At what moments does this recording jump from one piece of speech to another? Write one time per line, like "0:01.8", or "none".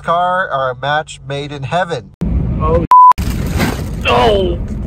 0:02.1